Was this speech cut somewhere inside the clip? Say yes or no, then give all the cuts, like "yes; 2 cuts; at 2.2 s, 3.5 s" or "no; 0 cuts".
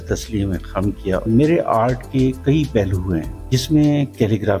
yes; 2 cuts; at 1.2 s, 3.3 s